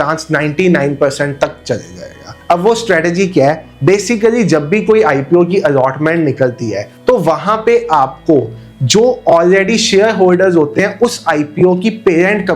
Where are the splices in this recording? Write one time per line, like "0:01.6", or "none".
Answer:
none